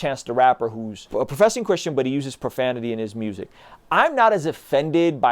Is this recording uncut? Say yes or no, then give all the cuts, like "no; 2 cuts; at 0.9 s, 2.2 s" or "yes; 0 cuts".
no; 1 cut; at 1.1 s